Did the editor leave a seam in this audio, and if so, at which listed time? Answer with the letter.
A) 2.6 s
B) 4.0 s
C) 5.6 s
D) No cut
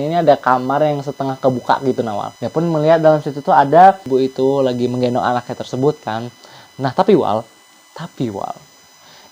B